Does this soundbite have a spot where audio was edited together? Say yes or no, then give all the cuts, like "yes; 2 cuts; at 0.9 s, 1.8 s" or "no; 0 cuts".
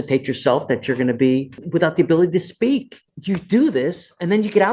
yes; 2 cuts; at 1.6 s, 3.1 s